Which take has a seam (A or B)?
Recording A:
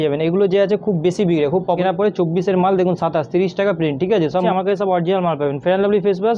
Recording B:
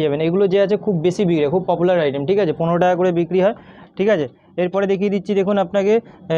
A